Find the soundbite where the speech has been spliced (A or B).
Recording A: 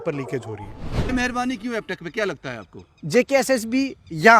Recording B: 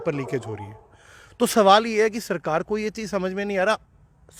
A